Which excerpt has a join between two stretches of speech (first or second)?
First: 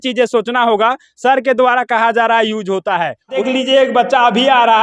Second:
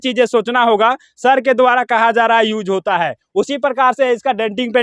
first